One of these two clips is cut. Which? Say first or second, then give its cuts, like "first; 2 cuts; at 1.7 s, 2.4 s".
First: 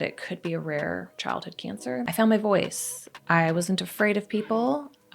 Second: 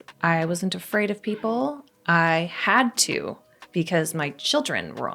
first; 1 cut; at 2.1 s